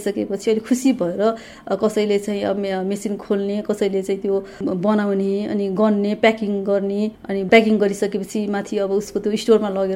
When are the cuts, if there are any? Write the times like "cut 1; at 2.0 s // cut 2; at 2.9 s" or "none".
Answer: none